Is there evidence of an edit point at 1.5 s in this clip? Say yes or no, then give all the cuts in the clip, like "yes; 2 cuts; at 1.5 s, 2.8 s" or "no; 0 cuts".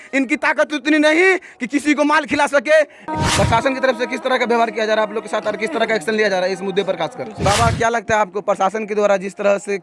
no; 2 cuts; at 2.9 s, 7.3 s